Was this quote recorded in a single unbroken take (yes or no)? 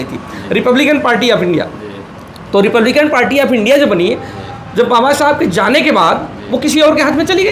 yes